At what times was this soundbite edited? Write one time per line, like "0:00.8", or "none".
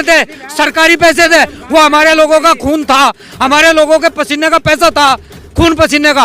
none